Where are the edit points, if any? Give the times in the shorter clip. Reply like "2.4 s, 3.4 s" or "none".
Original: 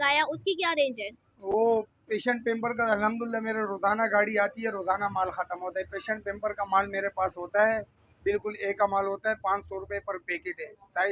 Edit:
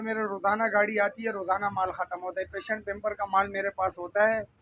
none